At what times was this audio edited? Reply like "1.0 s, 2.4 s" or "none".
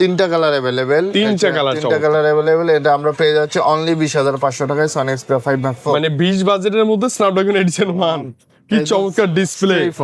none